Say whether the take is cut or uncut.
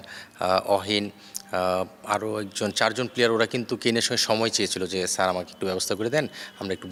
uncut